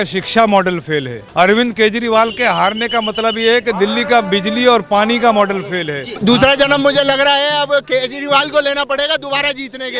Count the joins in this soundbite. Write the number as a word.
two